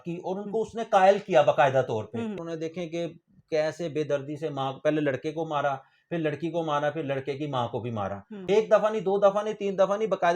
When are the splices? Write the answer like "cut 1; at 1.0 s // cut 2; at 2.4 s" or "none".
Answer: cut 1; at 2.4 s // cut 2; at 8.3 s